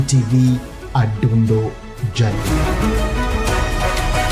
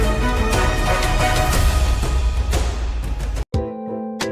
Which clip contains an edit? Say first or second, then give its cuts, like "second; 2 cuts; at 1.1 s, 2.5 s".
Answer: second; 1 cut; at 3.4 s